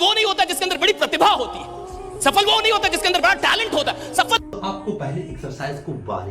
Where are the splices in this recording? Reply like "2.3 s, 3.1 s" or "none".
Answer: 4.4 s